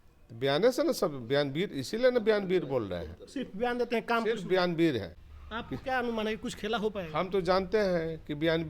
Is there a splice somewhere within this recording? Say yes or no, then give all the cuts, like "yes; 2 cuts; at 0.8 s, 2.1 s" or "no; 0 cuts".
yes; 1 cut; at 5.2 s